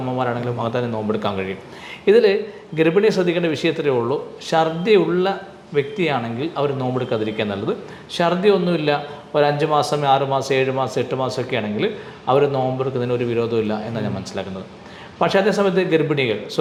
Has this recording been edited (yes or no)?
no